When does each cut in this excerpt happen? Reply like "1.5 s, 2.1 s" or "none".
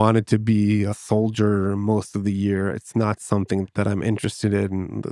1.0 s